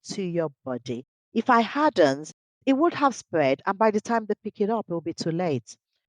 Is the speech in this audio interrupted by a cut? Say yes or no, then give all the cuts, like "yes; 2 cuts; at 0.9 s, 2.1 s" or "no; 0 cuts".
yes; 1 cut; at 2.6 s